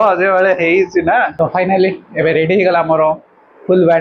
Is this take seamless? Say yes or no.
no